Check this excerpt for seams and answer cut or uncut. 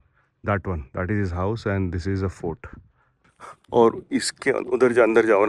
uncut